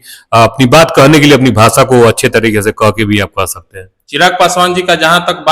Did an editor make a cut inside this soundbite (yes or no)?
no